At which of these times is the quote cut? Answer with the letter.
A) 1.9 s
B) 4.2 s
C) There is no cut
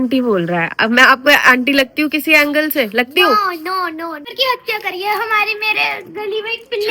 B